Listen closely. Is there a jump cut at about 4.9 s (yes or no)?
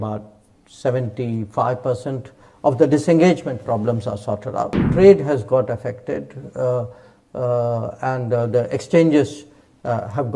yes